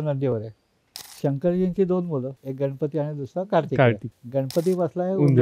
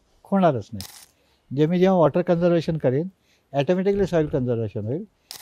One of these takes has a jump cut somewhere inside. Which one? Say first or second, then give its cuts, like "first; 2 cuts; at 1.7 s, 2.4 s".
first; 2 cuts; at 2.4 s, 4.1 s